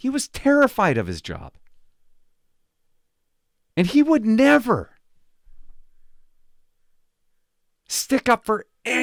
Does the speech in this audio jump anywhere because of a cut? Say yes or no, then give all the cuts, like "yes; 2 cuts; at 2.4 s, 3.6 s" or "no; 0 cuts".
no; 0 cuts